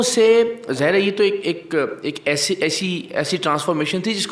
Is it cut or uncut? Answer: uncut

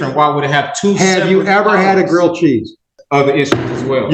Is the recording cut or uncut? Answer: cut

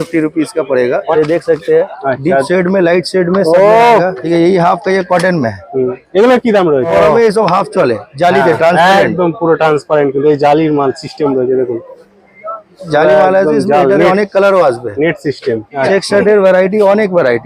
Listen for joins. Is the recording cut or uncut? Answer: cut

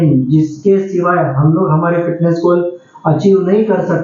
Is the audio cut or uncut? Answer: uncut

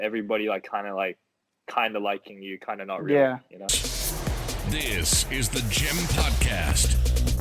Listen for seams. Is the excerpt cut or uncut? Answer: cut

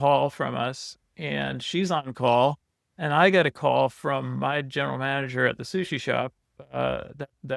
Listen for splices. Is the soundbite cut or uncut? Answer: uncut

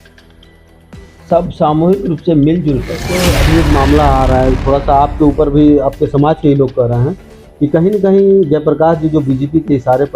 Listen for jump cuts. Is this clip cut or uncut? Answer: cut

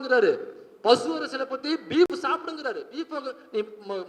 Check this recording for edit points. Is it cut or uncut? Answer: uncut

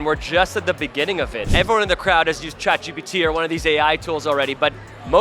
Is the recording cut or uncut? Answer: cut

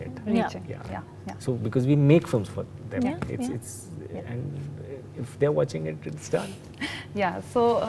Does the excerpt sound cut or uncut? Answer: uncut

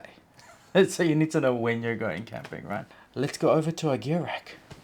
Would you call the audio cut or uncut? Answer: cut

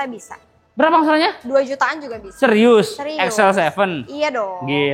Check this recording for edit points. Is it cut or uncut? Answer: uncut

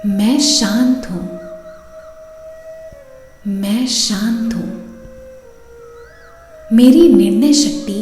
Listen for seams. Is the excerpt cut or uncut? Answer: cut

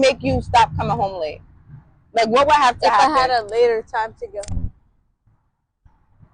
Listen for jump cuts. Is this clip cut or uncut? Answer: uncut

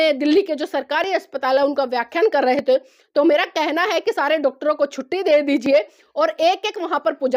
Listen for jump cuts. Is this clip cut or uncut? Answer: uncut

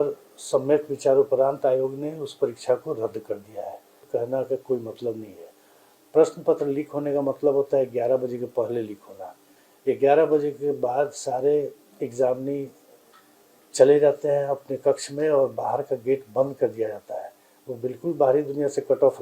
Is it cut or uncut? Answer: cut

